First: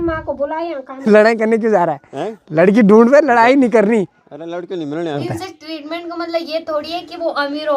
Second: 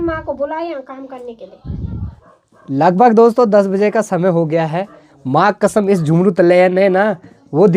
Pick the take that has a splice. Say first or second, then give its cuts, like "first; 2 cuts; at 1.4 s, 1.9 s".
first; 2 cuts; at 1.0 s, 5.3 s